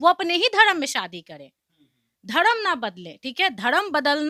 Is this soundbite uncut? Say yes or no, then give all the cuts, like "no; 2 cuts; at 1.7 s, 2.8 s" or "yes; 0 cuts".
yes; 0 cuts